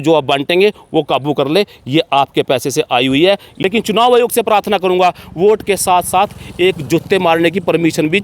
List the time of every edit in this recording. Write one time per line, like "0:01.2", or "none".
0:03.5